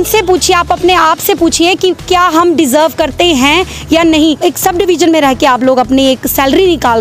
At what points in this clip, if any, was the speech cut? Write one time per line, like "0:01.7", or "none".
0:04.1

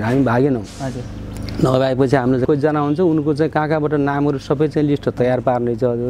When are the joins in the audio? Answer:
0:02.4

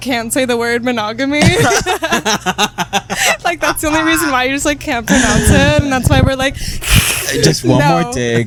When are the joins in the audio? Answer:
none

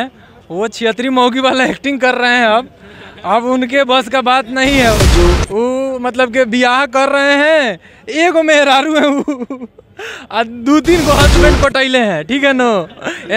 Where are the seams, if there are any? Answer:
none

